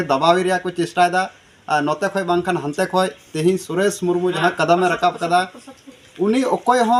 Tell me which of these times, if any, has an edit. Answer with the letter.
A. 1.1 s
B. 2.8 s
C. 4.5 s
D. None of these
D